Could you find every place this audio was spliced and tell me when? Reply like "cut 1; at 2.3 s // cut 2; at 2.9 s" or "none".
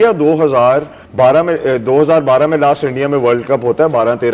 cut 1; at 1.0 s

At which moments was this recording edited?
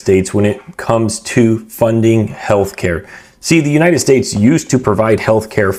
none

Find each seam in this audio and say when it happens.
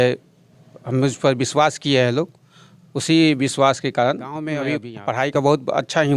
cut 1; at 4.6 s

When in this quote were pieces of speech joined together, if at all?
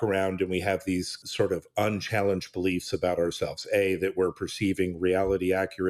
cut 1; at 1.2 s

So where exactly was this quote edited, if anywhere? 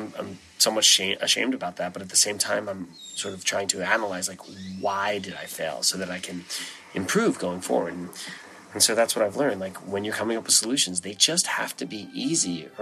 none

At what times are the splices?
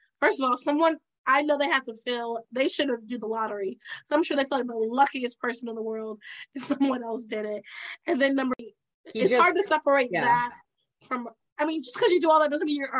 cut 1; at 8.7 s

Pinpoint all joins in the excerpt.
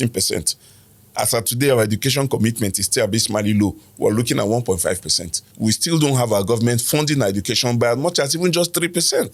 cut 1; at 5.5 s

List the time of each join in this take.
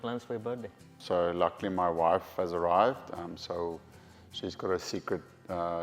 cut 1; at 1.0 s

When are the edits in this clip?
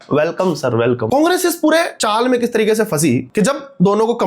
cut 1; at 1.0 s // cut 2; at 2.0 s // cut 3; at 3.3 s

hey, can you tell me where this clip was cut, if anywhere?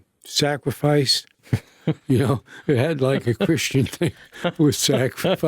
cut 1; at 1.4 s

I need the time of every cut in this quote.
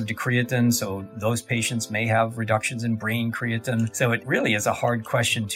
cut 1; at 4.2 s

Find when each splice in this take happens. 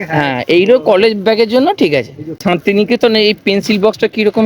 cut 1; at 2.3 s

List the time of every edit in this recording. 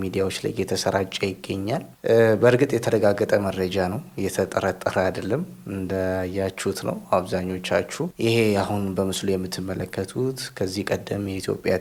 none

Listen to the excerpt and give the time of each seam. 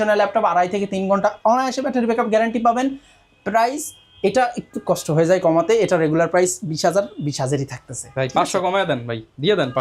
none

